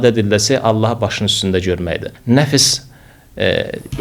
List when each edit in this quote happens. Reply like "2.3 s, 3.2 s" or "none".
2.1 s